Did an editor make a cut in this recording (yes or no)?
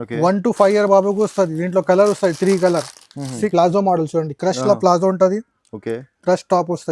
yes